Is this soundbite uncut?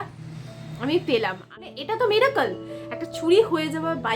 no; 1 cut; at 1.6 s

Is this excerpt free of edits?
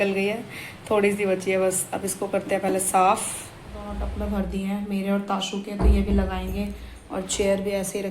no; 1 cut; at 4.1 s

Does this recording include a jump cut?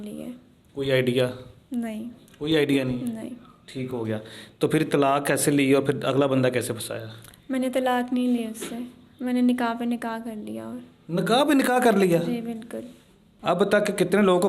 yes; 1 cut; at 13.4 s

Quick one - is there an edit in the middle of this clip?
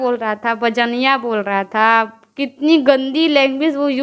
no; 0 cuts

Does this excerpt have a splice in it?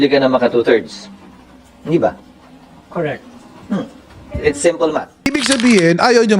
no; 0 cuts

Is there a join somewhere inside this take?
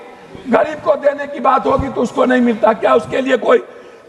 no; 0 cuts

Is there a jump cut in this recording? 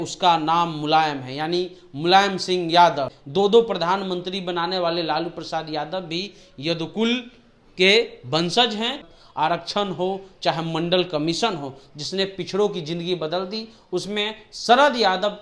yes; 2 cuts; at 3.1 s, 9.1 s

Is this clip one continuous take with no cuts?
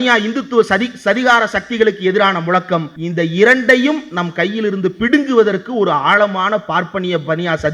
no; 1 cut; at 3.0 s

